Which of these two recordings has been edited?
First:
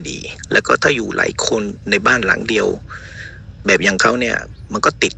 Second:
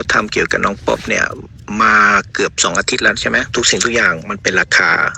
second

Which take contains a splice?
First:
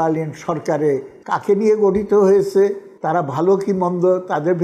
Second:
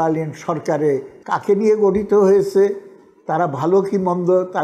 first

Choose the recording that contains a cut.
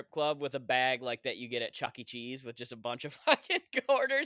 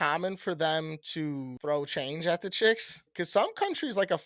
second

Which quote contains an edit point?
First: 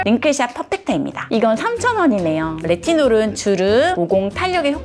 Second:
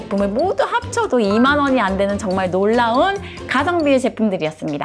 first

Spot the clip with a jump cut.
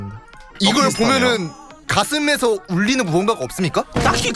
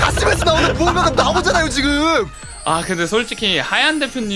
second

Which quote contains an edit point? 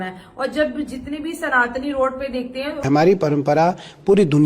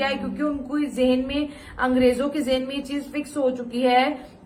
first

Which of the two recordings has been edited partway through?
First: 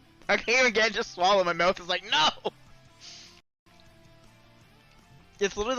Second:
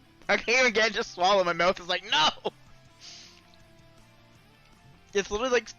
second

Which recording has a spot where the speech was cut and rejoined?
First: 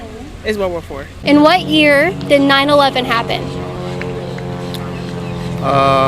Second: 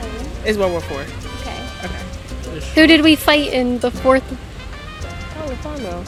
first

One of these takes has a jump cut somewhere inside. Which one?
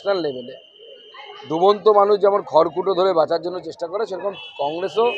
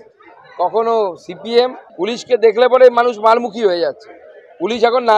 second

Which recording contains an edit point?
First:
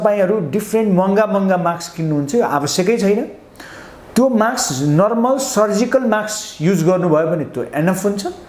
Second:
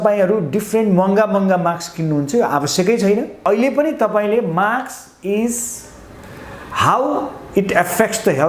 second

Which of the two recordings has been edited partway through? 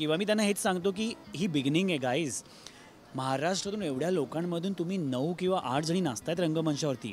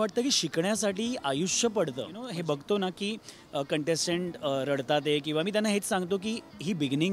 second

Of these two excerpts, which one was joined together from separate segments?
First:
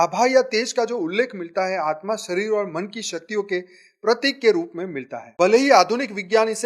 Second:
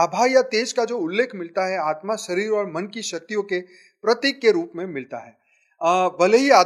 first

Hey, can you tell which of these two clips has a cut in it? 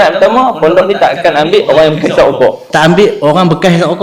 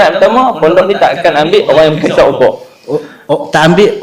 first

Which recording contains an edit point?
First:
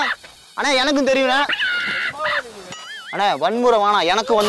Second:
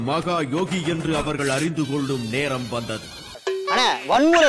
first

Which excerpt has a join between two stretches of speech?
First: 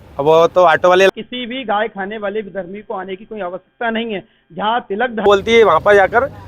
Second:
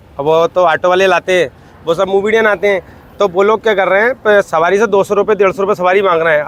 first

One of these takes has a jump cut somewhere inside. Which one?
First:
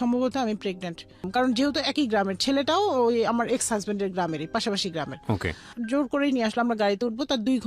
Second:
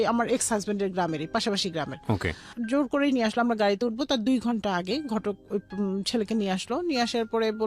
first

